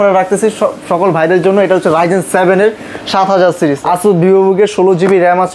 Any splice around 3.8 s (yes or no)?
yes